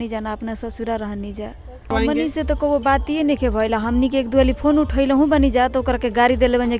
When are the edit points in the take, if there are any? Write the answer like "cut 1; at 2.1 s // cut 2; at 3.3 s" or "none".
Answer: cut 1; at 1.9 s